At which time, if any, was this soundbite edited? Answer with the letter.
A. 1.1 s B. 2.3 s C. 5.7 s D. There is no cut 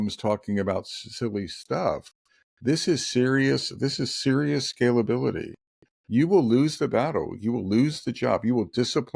D